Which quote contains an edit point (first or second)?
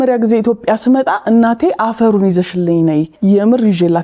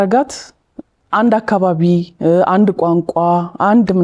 first